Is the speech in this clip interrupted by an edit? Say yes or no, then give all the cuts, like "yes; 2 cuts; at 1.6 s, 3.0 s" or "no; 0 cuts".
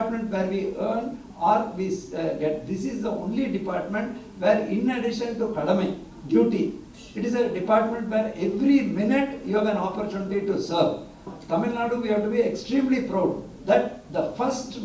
yes; 2 cuts; at 11.3 s, 13.5 s